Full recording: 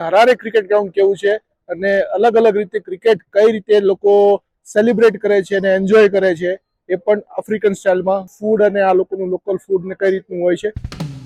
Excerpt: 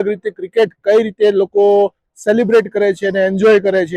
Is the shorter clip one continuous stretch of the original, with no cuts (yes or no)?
yes